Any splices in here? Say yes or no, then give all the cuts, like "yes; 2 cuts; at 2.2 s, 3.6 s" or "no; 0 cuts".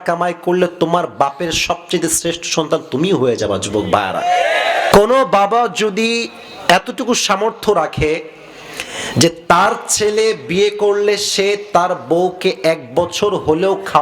yes; 1 cut; at 4.9 s